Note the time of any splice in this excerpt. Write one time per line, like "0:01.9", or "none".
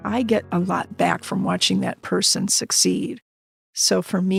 none